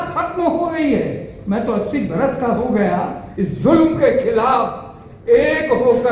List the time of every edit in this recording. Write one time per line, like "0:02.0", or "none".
0:03.2